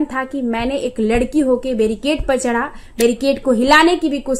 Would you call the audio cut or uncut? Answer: uncut